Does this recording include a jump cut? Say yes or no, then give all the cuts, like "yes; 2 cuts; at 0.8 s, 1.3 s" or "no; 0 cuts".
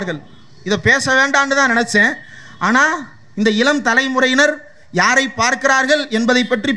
no; 0 cuts